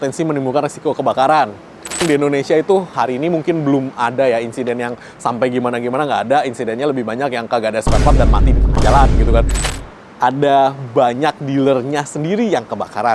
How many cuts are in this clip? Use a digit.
3